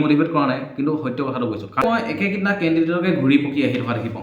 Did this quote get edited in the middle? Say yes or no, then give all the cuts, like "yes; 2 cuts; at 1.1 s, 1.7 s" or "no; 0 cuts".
yes; 1 cut; at 1.8 s